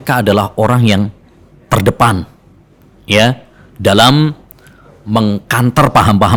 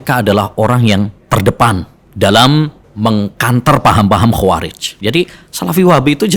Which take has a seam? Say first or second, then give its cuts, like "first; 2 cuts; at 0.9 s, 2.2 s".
second; 4 cuts; at 1.2 s, 2.0 s, 2.8 s, 4.9 s